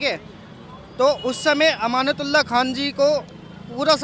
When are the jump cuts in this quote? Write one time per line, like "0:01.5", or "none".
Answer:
none